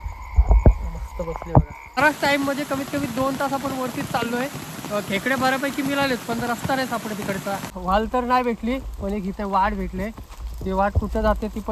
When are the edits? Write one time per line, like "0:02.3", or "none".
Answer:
0:01.8
0:07.7